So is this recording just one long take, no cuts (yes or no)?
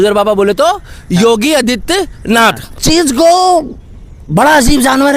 no